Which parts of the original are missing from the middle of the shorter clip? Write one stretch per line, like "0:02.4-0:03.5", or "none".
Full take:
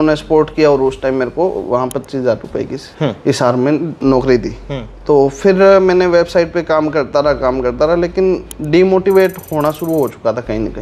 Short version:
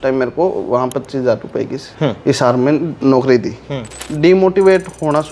0:05.0-0:08.5